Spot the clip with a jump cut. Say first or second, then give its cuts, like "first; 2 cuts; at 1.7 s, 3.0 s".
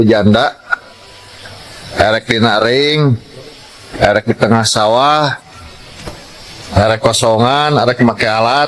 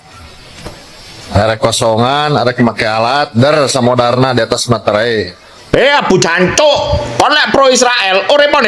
second; 1 cut; at 5.6 s